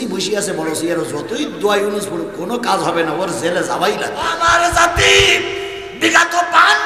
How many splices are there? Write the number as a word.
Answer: one